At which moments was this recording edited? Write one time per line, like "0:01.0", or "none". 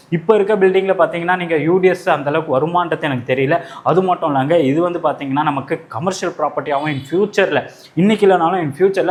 none